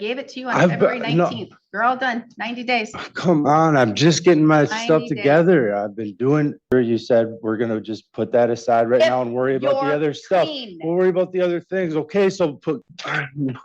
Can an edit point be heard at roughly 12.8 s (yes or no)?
yes